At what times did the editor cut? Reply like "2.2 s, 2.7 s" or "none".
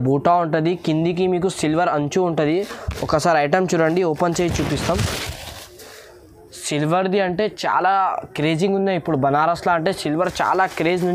none